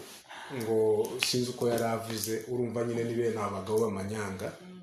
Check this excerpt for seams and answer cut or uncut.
uncut